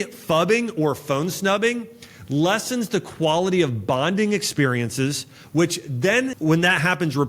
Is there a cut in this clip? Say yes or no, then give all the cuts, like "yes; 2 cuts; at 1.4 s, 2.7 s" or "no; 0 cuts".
yes; 1 cut; at 6.3 s